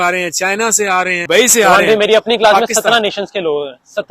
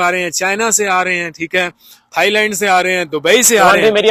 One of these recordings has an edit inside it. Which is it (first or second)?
first